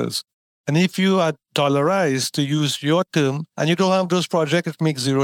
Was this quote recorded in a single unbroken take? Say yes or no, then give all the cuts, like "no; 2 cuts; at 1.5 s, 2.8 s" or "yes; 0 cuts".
yes; 0 cuts